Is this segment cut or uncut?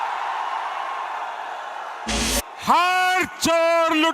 cut